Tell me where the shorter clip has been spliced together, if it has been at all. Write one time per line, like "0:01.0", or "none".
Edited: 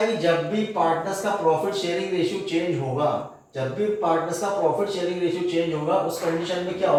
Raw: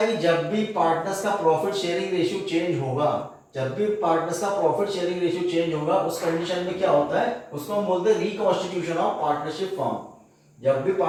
none